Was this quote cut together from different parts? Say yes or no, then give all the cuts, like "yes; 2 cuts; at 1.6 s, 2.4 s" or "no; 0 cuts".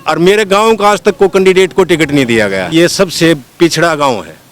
yes; 1 cut; at 2.7 s